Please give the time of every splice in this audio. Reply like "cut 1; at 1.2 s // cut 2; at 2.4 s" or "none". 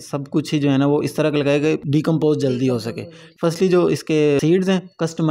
cut 1; at 1.8 s // cut 2; at 3.2 s // cut 3; at 4.4 s